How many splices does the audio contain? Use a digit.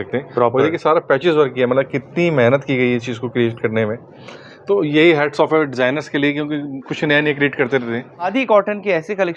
1